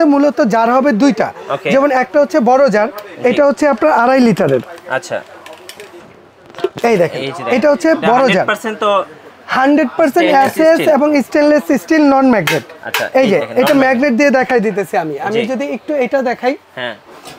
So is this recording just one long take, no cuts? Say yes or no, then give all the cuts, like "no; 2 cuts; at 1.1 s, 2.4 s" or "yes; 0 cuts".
yes; 0 cuts